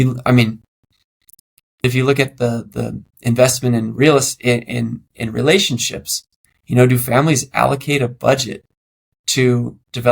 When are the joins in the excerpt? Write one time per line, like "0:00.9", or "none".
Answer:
0:01.8

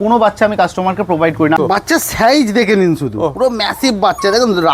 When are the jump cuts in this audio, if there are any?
0:01.6

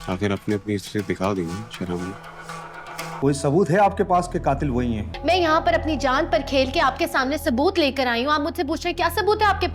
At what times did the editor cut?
0:03.2
0:05.1

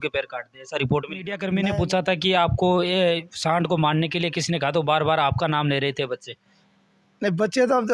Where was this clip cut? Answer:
0:01.4

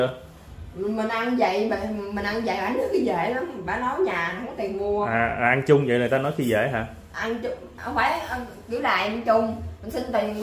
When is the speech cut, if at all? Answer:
none

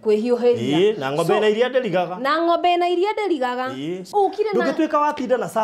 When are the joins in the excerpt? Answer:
0:04.0

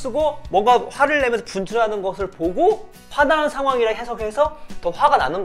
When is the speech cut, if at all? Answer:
0:03.0

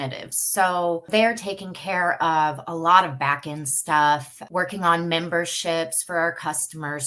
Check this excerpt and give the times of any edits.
0:01.1
0:04.3

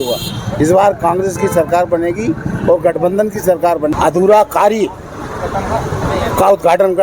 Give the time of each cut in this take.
0:03.9

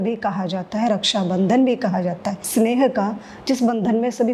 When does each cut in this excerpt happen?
0:02.4

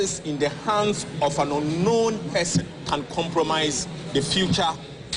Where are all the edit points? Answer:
0:02.8
0:03.9

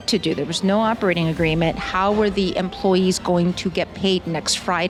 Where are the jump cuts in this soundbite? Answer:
none

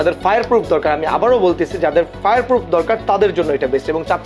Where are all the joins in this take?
none

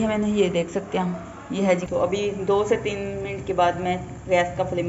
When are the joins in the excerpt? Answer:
0:01.9

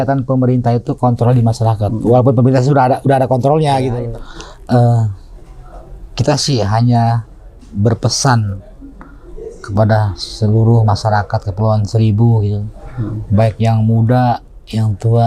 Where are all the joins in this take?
0:04.0

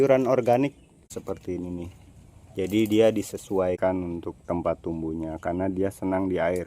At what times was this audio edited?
0:01.1
0:03.8

